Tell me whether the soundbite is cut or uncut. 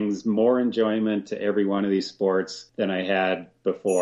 cut